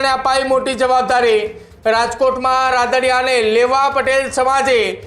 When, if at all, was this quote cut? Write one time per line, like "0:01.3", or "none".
none